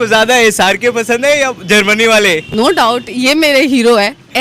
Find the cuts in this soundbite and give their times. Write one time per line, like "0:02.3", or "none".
0:02.5